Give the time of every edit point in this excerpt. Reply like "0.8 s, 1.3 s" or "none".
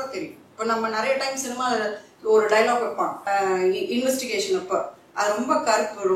3.2 s